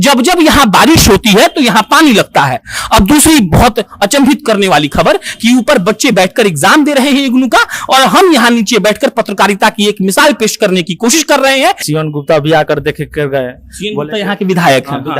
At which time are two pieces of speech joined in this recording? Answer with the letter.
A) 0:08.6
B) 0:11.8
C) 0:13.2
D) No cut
B